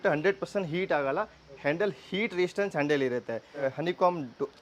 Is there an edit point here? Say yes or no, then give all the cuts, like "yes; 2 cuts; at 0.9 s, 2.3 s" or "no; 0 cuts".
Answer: yes; 1 cut; at 3.6 s